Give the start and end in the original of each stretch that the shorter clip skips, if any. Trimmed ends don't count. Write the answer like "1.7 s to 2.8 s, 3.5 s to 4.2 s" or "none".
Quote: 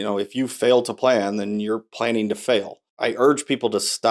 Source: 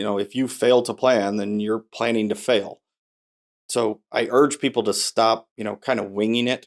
2.9 s to 4.0 s